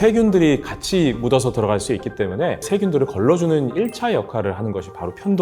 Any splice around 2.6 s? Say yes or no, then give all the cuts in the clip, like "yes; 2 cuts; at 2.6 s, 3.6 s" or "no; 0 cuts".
yes; 1 cut; at 2.6 s